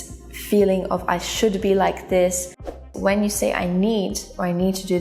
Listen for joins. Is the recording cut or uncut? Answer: cut